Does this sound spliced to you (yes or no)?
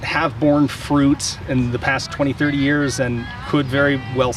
no